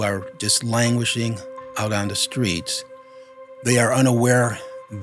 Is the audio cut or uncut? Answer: cut